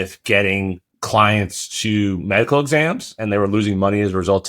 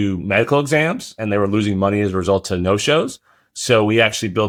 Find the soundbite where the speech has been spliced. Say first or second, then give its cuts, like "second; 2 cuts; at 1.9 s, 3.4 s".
first; 1 cut; at 0.9 s